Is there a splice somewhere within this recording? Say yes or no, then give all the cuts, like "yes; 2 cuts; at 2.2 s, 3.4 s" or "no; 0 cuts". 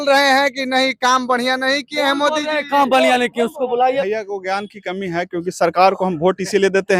yes; 1 cut; at 3.9 s